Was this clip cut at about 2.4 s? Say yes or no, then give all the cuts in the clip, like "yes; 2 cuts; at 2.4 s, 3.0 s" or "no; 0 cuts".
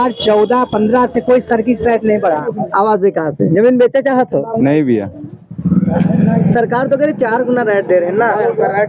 yes; 1 cut; at 2.4 s